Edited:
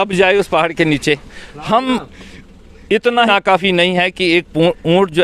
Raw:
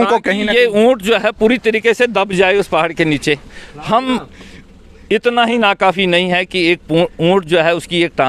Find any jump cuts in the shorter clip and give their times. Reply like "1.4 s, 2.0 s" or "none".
3.3 s